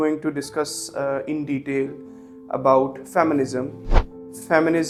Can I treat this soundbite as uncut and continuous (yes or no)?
yes